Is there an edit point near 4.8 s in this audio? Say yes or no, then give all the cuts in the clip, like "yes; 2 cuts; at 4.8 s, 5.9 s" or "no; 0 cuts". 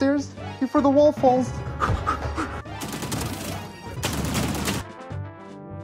yes; 3 cuts; at 2.6 s, 4.0 s, 4.8 s